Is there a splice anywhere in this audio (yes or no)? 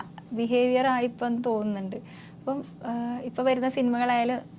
no